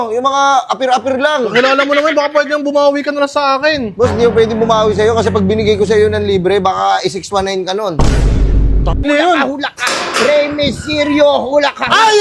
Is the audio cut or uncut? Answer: cut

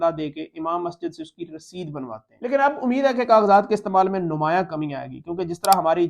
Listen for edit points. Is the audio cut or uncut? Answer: cut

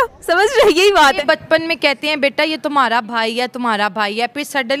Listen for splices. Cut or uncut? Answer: cut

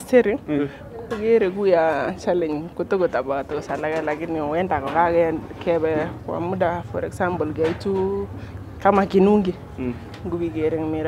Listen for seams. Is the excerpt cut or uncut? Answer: uncut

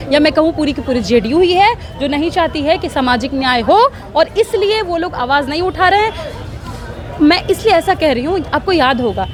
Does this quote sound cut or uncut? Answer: uncut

